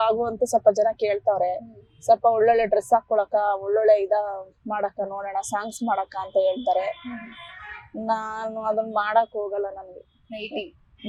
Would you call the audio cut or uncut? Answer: uncut